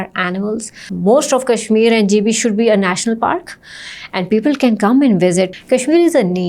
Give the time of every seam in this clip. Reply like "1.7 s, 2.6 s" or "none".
0.9 s, 5.5 s